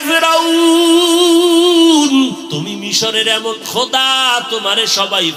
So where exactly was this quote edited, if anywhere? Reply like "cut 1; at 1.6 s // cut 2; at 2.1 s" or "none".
cut 1; at 2.5 s